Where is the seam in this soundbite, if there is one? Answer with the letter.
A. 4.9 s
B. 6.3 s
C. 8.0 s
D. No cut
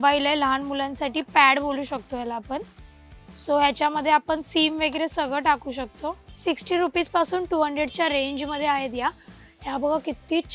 B